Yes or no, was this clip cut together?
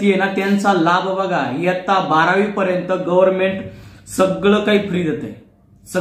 no